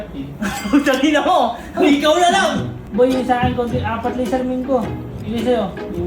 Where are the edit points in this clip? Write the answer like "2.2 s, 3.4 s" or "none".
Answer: 2.8 s